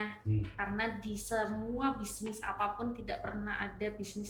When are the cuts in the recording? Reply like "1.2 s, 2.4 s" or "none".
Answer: none